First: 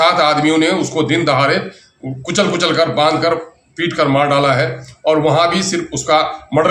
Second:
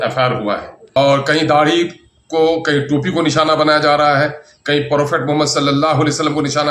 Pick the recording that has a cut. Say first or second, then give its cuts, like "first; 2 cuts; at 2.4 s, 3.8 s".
second; 1 cut; at 0.9 s